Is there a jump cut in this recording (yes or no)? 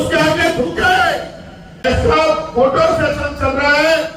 yes